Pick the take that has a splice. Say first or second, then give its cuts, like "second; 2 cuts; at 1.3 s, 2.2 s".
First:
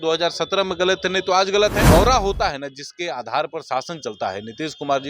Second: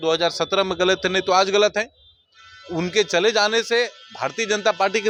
first; 1 cut; at 1.9 s